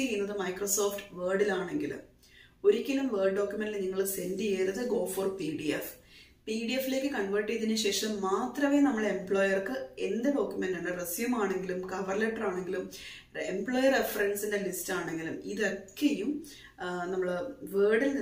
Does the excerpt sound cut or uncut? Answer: uncut